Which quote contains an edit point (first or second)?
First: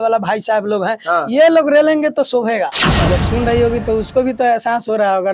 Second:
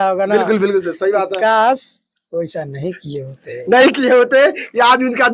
first